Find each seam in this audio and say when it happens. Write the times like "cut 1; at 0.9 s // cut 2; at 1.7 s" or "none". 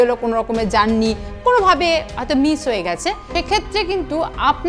cut 1; at 3.2 s